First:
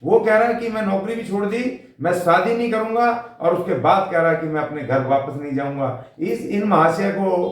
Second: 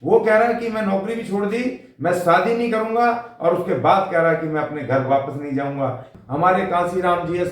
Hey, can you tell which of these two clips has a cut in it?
second; 1 cut; at 6.1 s

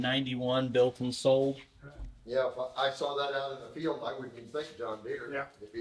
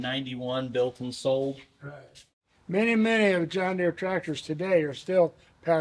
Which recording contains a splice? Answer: second; 1 cut; at 2.2 s

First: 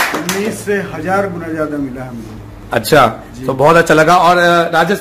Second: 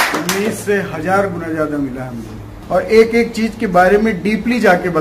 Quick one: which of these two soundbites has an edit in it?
second; 1 cut; at 2.5 s

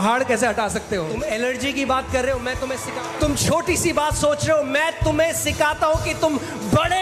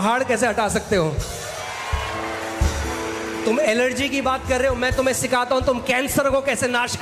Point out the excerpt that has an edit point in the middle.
first; 2 cuts; at 1.1 s, 2.8 s

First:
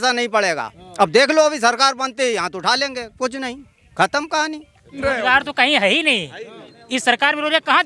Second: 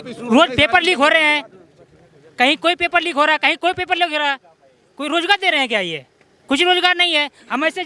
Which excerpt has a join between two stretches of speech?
first; 1 cut; at 5.0 s

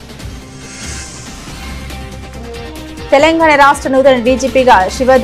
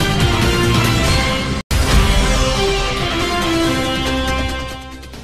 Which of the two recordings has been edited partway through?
second; 1 cut; at 1.6 s

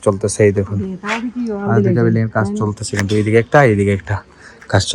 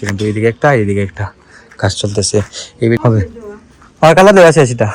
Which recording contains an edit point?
second; 1 cut; at 3.0 s

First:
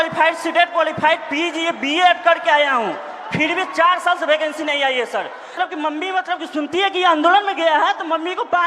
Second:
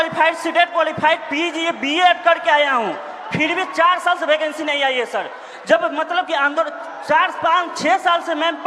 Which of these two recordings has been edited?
first; 1 cut; at 5.5 s

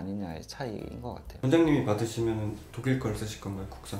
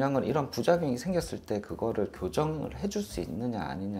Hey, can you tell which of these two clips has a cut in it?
first; 1 cut; at 1.3 s

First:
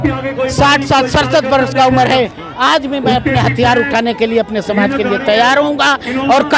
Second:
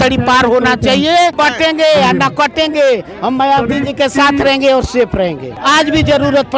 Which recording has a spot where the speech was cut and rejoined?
second; 2 cuts; at 1.4 s, 5.5 s

